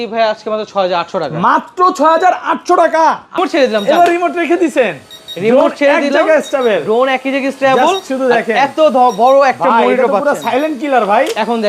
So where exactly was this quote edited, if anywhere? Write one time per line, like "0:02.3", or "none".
0:03.4